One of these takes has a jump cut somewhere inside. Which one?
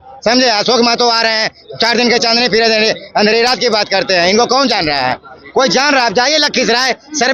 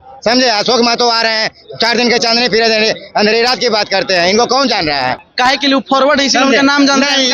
second; 1 cut; at 5.3 s

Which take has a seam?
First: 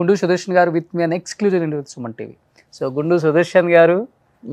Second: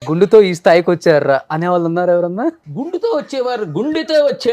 second; 1 cut; at 2.6 s

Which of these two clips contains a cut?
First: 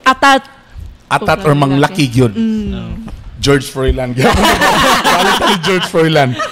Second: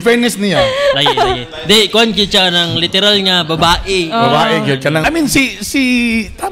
second; 1 cut; at 5.0 s

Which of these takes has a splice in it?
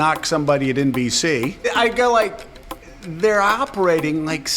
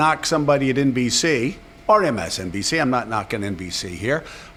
first; 1 cut; at 1.6 s

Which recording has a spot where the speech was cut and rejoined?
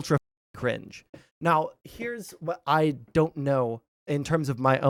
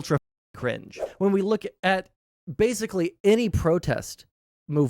second; 1 cut; at 1.0 s

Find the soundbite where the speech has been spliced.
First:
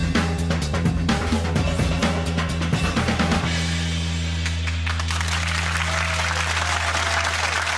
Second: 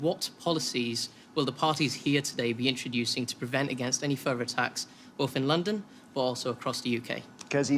first; 1 cut; at 5.1 s

